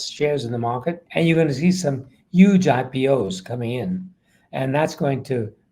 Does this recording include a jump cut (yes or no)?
yes